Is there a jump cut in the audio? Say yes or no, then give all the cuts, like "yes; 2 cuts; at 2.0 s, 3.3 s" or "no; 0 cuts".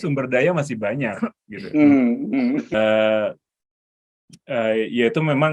no; 0 cuts